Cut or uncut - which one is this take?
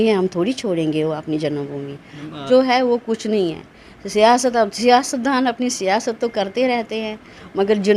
cut